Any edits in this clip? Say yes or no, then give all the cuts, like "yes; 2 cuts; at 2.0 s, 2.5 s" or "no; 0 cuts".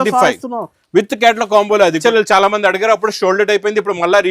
yes; 1 cut; at 2.0 s